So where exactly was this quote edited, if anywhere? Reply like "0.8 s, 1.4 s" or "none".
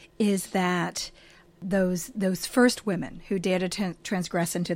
1.6 s